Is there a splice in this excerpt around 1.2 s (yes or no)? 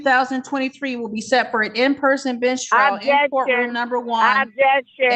no